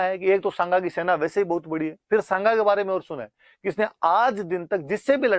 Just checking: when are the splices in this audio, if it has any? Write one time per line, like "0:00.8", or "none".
none